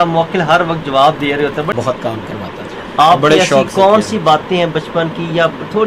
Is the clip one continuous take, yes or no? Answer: no